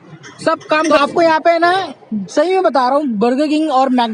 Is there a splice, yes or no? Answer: yes